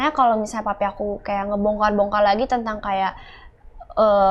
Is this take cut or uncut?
uncut